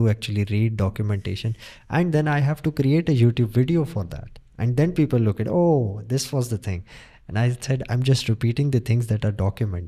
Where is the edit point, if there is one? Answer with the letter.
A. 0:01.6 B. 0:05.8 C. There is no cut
C